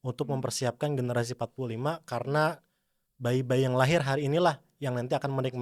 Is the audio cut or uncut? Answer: uncut